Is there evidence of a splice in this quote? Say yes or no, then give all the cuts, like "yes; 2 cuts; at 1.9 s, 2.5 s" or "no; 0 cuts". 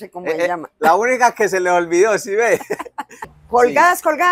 yes; 1 cut; at 3.3 s